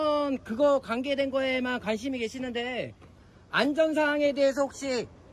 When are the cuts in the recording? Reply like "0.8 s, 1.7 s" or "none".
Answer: none